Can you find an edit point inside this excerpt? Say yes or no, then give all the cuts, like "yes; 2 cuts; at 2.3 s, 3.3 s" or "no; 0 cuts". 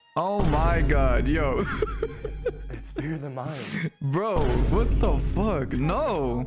no; 0 cuts